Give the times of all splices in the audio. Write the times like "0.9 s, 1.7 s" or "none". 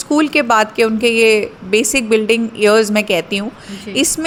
none